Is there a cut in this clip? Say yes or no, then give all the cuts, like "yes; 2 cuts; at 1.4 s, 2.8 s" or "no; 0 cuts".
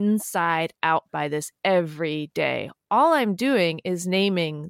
no; 0 cuts